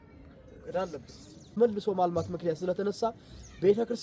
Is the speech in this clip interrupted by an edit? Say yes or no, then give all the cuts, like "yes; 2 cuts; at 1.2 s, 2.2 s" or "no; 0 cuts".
yes; 1 cut; at 1.6 s